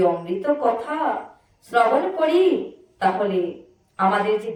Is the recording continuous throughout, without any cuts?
yes; 0 cuts

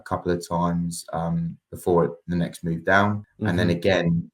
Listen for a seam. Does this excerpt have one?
yes; 1 cut; at 3.3 s

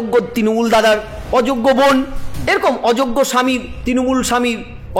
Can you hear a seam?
no; 0 cuts

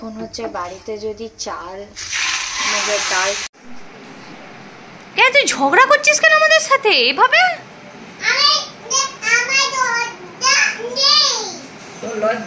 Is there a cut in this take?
yes; 1 cut; at 3.5 s

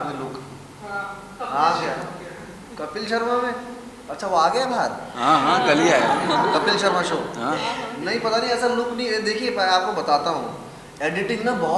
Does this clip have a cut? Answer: no; 0 cuts

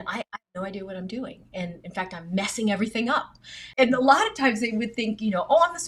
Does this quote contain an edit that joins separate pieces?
yes; 1 cut; at 3.6 s

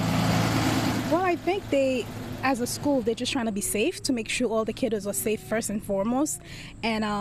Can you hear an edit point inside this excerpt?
yes; 1 cut; at 1.0 s

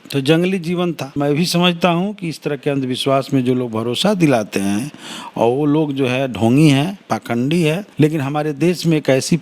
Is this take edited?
yes; 2 cuts; at 1.1 s, 7.8 s

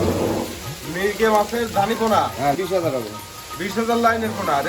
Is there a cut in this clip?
yes; 1 cut; at 2.6 s

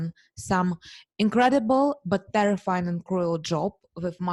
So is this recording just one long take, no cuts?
yes; 0 cuts

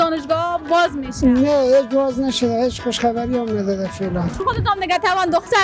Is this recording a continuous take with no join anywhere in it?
no; 1 cut; at 4.4 s

